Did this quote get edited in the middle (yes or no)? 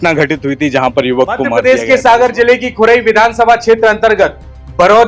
yes